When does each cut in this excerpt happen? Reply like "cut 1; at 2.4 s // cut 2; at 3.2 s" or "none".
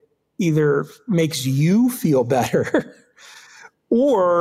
none